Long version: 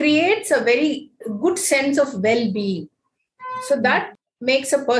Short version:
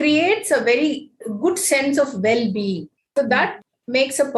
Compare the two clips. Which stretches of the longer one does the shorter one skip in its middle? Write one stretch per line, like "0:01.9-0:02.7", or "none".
0:03.0-0:03.5